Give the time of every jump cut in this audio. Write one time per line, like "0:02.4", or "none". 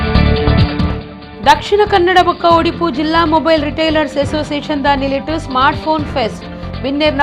0:01.1